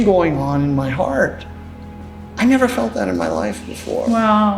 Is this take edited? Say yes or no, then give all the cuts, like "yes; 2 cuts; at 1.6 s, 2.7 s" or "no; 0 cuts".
no; 0 cuts